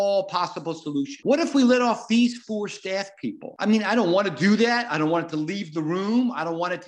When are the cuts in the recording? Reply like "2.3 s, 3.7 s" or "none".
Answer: 1.1 s, 3.5 s